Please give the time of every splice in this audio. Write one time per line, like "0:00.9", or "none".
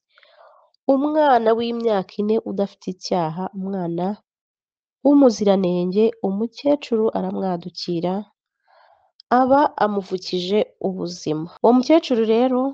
0:11.5